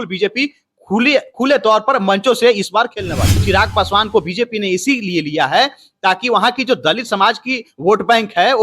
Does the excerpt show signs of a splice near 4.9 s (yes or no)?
no